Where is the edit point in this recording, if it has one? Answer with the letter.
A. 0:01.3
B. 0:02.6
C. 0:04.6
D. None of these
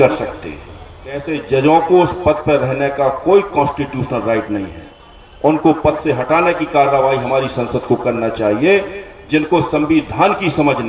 A